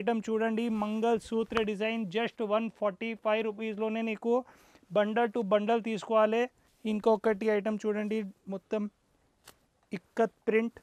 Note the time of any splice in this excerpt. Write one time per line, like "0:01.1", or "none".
none